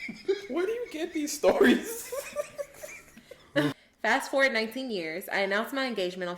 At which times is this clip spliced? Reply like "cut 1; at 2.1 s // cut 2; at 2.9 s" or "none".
cut 1; at 3.8 s